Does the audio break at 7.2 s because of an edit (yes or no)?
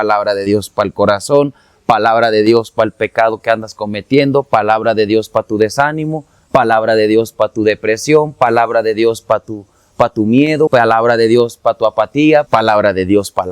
no